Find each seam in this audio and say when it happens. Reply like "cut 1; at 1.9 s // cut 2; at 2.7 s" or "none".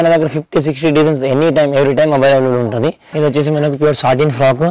cut 1; at 3.0 s